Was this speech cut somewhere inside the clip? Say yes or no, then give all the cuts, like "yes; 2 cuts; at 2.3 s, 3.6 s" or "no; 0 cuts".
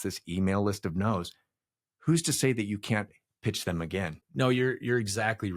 yes; 1 cut; at 4.2 s